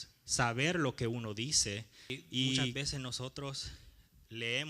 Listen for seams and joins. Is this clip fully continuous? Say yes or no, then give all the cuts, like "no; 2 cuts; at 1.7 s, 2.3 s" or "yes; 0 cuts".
no; 1 cut; at 2.7 s